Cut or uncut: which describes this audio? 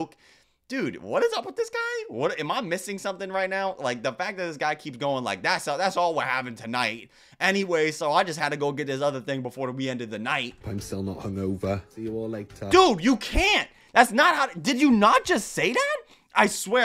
uncut